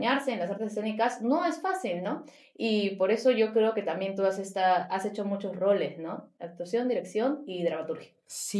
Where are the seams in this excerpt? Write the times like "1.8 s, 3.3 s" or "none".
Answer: none